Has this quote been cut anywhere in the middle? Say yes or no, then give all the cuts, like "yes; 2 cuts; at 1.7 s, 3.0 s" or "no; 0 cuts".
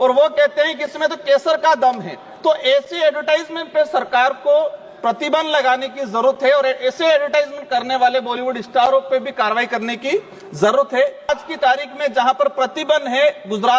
yes; 1 cut; at 11.3 s